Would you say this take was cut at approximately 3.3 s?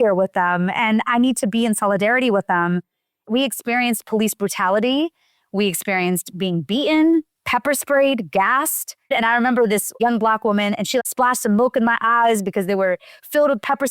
yes; 2 cuts; at 3.3 s, 9.1 s

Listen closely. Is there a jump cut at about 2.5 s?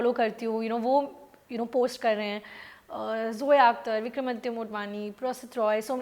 no; 0 cuts

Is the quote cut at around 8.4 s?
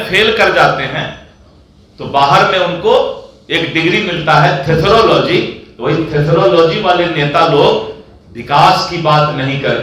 no; 0 cuts

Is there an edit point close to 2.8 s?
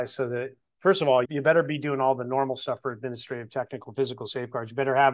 no; 1 cut; at 1.3 s

